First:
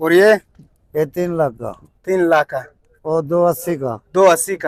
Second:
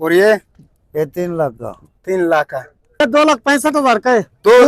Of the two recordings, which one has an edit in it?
second; 1 cut; at 3.0 s

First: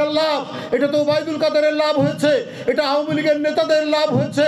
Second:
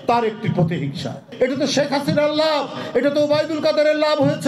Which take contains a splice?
second; 1 cut; at 1.3 s

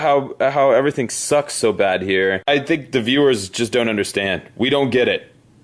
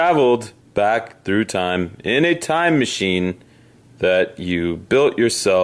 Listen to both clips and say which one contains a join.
first; 1 cut; at 1.8 s

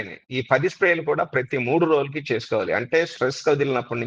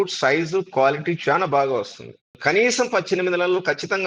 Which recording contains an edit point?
second; 1 cut; at 2.3 s

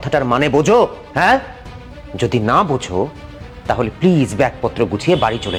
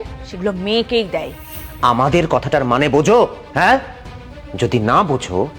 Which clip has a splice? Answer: second; 1 cut; at 1.4 s

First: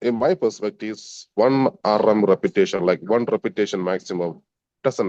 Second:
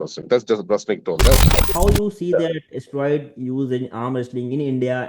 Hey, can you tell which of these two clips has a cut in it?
second; 1 cut; at 1.5 s

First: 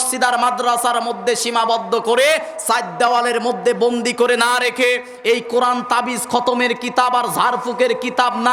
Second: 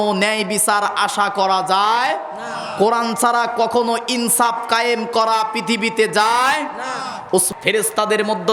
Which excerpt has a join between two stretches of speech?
second; 1 cut; at 7.5 s

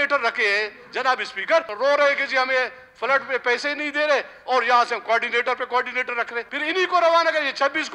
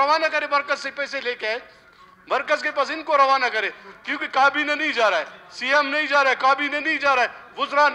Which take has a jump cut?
first; 2 cuts; at 1.7 s, 6.5 s

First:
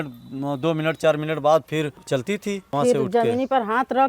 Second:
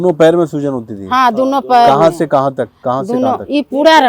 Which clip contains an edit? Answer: first; 1 cut; at 2.3 s

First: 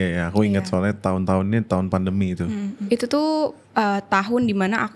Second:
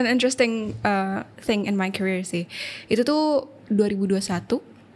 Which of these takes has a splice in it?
first; 2 cuts; at 2.8 s, 3.6 s

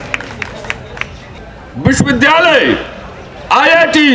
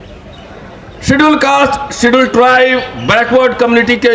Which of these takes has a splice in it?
first; 1 cut; at 1.4 s

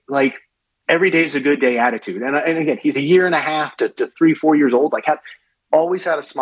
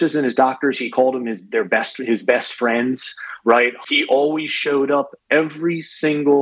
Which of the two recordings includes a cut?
second; 1 cut; at 3.5 s

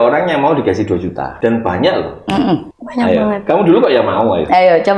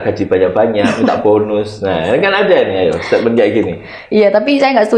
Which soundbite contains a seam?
first; 2 cuts; at 1.2 s, 2.8 s

